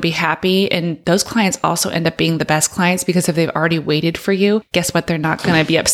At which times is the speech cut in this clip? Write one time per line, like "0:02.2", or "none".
0:01.0
0:04.7

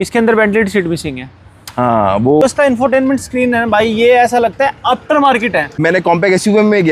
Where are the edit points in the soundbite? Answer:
0:02.4
0:05.7

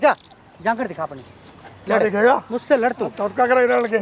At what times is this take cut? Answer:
none

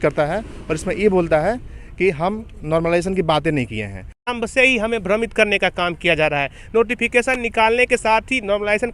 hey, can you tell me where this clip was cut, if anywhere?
0:04.2

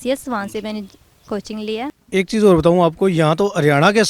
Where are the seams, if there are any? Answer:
0:02.0

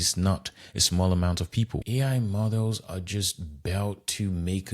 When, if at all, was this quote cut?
0:01.8

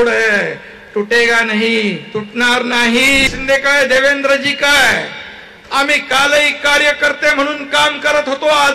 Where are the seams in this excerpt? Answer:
0:03.3

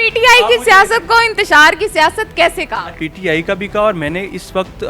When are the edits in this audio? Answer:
0:02.9

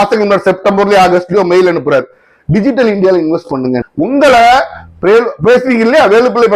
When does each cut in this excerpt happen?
0:03.8

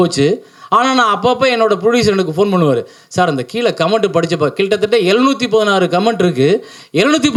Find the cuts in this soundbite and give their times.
none

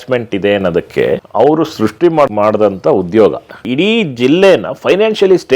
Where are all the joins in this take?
0:01.3
0:02.3
0:03.6

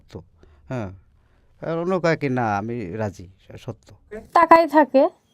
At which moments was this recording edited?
0:04.3

